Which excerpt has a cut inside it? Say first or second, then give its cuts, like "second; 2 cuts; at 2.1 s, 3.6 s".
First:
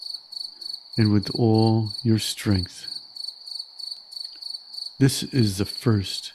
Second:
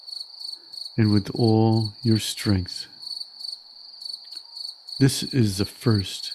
second; 2 cuts; at 2.9 s, 4.9 s